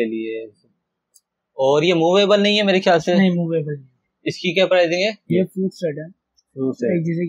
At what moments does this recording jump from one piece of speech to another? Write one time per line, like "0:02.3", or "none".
0:05.2